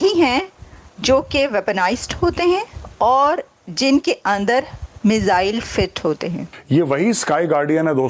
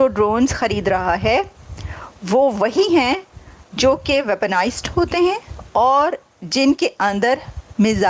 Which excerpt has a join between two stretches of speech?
first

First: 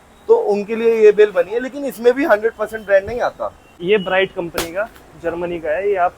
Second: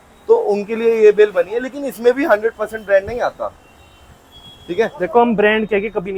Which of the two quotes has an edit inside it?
first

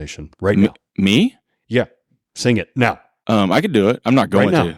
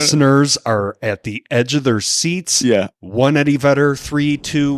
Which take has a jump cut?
first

